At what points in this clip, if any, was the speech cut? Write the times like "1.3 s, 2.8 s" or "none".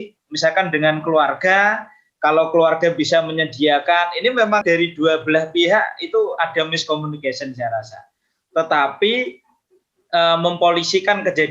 4.6 s